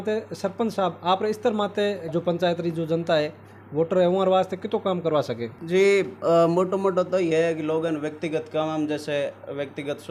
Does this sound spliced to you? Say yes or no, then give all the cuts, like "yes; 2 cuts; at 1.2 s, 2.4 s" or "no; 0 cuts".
no; 0 cuts